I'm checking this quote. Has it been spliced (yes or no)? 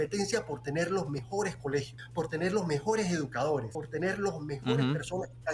yes